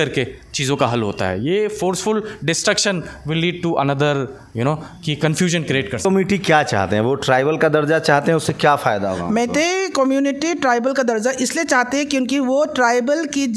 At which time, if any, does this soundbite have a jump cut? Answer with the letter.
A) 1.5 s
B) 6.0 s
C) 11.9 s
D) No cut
B